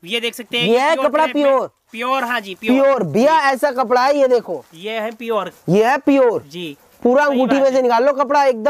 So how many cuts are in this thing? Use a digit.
0